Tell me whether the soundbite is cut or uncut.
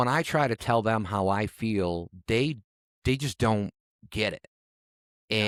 uncut